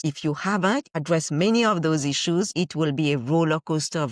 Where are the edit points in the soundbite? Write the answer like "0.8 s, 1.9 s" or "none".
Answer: 0.9 s, 2.5 s